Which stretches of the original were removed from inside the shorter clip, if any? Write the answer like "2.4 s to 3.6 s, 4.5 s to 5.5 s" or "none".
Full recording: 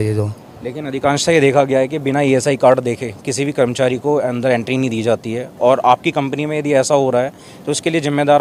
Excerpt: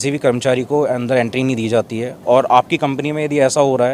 none